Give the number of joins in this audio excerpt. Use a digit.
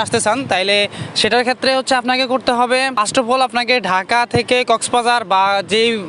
1